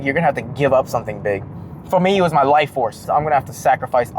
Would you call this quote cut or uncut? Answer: cut